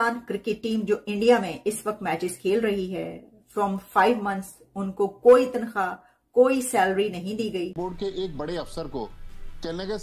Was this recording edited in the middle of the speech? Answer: yes; 1 cut; at 7.7 s

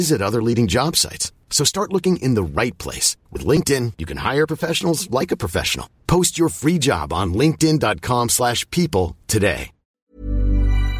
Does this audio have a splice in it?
yes; 1 cut; at 9.9 s

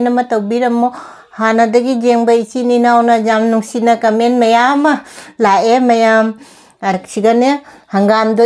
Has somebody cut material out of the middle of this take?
yes; 1 cut; at 7.0 s

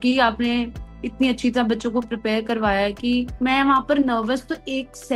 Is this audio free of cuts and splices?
no; 1 cut; at 3.3 s

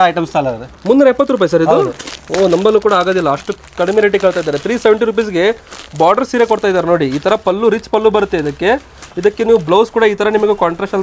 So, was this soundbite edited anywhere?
no; 0 cuts

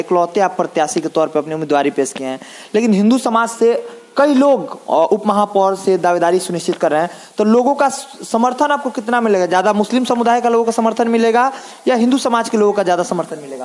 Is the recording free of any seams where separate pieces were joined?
yes; 0 cuts

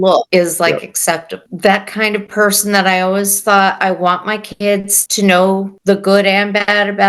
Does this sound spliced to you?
yes; 3 cuts; at 1.5 s, 5.0 s, 5.7 s

